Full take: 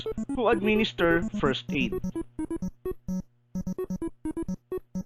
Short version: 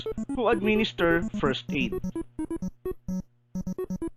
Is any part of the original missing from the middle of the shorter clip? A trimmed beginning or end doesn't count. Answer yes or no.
no